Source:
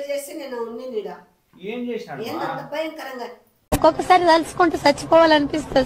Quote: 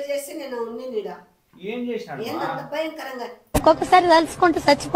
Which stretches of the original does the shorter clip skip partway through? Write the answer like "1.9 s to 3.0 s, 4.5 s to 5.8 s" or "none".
3.3 s to 3.5 s